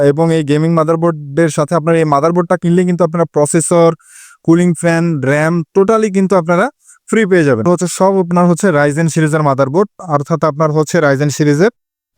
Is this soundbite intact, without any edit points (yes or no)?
no